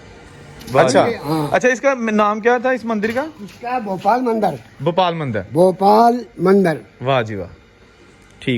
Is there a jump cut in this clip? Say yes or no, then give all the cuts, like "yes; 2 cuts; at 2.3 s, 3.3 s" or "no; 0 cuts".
yes; 1 cut; at 1.5 s